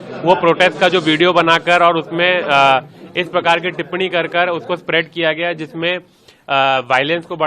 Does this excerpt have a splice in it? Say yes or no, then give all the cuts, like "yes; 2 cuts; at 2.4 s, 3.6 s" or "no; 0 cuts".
no; 0 cuts